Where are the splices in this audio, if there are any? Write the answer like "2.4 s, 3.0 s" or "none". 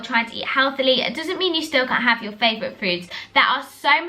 none